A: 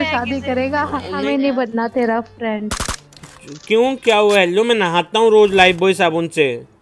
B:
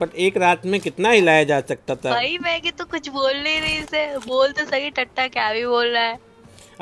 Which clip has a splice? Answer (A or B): A